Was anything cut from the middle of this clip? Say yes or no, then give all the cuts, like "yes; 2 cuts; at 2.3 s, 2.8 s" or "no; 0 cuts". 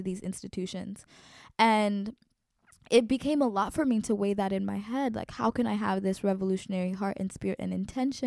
no; 0 cuts